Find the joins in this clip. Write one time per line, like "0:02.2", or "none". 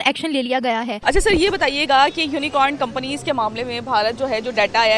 0:01.0